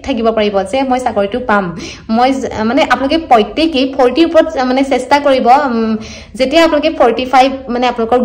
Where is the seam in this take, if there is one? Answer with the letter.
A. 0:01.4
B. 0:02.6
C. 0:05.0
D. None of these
D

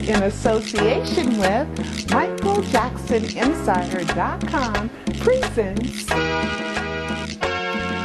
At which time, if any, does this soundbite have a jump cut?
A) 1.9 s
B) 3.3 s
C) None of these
A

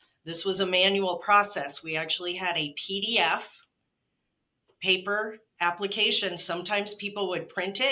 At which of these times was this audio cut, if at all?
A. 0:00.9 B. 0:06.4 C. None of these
C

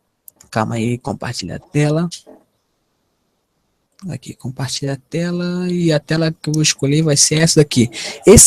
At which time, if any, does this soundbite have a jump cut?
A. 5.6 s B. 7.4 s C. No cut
A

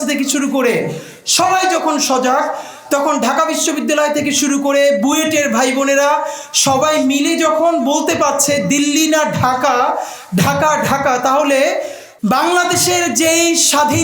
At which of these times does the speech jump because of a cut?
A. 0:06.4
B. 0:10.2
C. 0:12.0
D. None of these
C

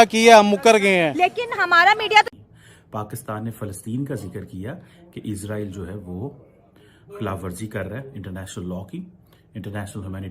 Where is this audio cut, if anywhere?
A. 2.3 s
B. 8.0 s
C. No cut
A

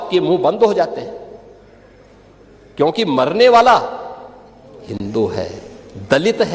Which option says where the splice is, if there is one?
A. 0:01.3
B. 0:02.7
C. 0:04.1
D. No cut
D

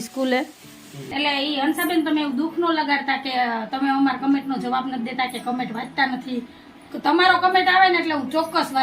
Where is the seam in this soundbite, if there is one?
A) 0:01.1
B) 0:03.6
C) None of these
A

